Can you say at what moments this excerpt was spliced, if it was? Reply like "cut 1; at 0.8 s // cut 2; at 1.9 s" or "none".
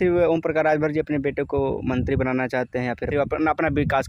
cut 1; at 3.1 s